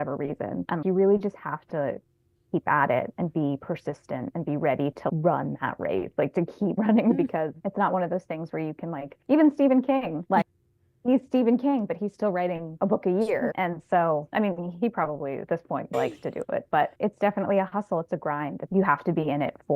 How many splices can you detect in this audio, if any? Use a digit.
2